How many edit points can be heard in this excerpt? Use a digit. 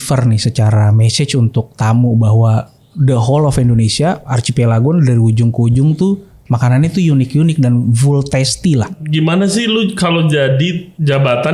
1